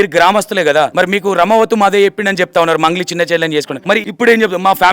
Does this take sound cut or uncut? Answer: cut